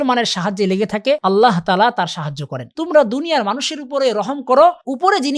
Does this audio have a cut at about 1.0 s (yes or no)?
no